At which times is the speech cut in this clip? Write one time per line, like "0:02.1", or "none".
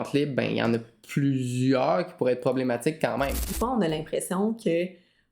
0:03.5